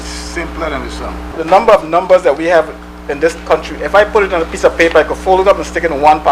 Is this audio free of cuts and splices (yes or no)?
no